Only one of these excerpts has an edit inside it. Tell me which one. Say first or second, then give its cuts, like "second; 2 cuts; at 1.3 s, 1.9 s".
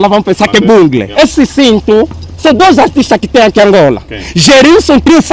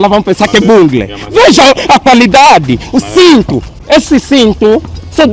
first; 1 cut; at 1.0 s